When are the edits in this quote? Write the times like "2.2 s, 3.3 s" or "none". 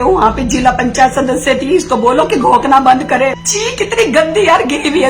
3.4 s